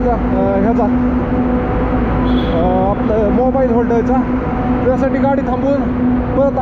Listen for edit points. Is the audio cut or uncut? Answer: uncut